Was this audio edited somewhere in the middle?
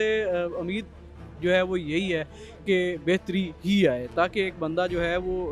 no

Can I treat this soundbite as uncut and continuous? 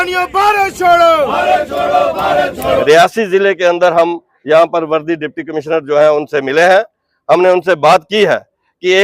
no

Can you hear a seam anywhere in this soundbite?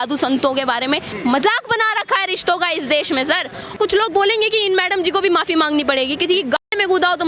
yes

